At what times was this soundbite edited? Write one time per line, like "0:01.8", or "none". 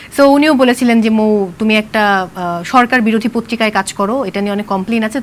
none